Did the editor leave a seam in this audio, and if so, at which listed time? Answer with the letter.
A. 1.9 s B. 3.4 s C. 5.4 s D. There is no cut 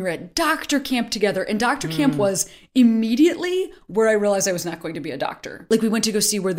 C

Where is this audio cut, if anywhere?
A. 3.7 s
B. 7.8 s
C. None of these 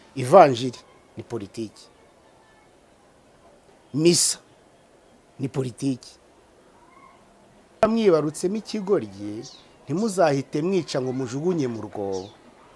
B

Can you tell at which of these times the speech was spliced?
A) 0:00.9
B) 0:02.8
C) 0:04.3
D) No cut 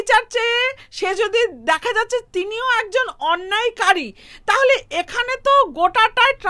D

